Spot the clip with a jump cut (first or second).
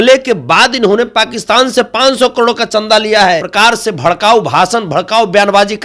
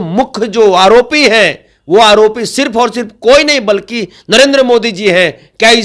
first